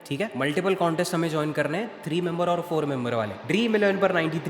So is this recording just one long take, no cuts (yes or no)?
no